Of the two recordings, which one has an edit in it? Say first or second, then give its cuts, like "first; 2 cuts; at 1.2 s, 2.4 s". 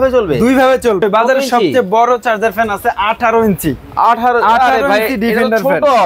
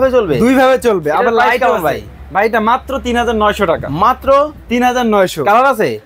first; 1 cut; at 1.0 s